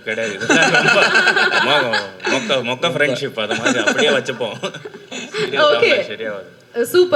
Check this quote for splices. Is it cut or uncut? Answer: uncut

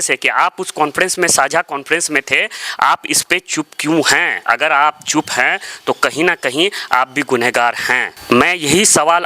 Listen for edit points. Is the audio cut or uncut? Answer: cut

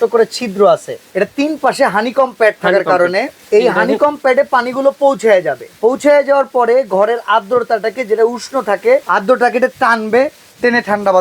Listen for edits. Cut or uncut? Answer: cut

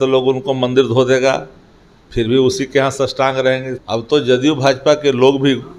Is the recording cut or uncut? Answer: cut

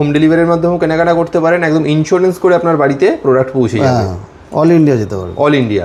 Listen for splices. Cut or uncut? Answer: uncut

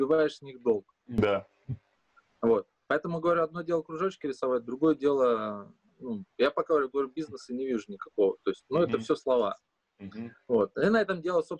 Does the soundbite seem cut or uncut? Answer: uncut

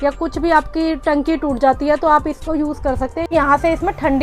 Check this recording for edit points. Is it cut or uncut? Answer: cut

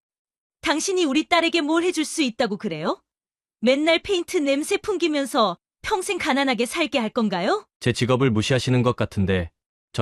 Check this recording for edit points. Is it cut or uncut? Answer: uncut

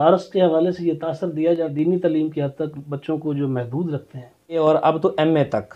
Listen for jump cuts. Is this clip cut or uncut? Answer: cut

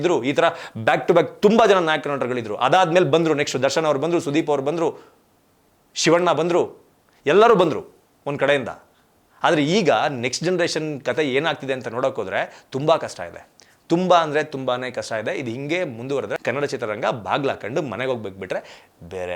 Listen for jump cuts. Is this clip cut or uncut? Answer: cut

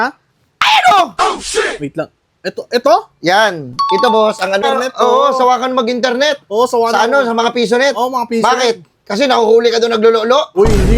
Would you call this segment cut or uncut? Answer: cut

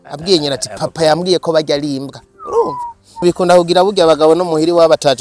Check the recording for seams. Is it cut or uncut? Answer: cut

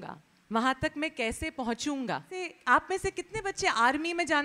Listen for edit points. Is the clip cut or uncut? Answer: cut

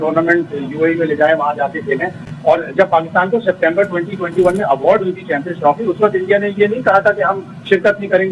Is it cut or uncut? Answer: uncut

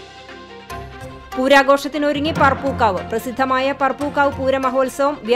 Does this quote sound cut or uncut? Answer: cut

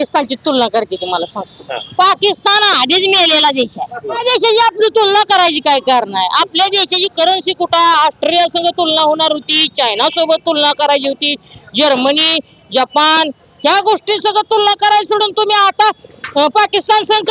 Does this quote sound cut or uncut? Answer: cut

